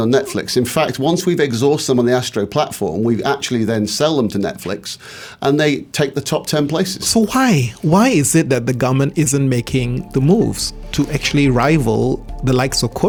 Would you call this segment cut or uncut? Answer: uncut